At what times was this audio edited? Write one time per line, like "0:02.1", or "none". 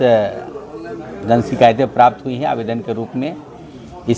none

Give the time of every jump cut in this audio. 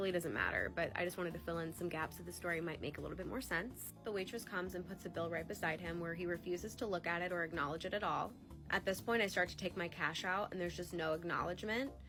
none

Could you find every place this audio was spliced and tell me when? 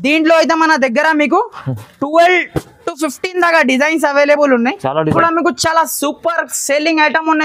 0:05.2

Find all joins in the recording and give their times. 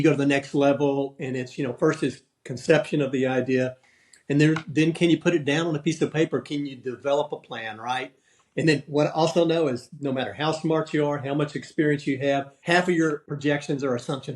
0:12.5
0:13.3

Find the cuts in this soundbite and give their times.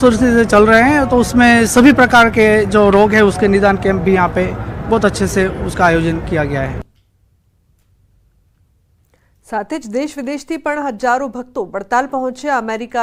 none

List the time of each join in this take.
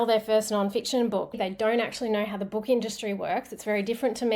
0:01.4

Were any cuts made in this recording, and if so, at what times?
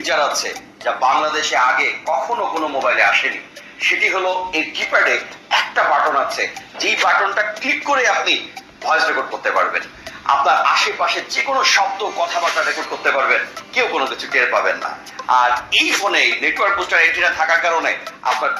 0:01.4
0:04.1

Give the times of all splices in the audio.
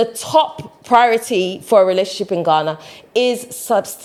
none

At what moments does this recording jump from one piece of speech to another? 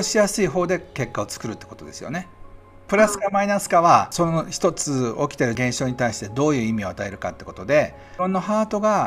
0:02.8
0:04.1
0:05.6
0:08.0

